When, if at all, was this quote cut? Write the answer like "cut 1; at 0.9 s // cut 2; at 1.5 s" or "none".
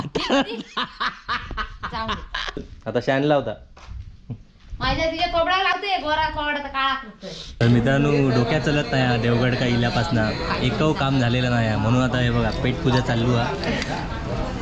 cut 1; at 2.6 s // cut 2; at 7.6 s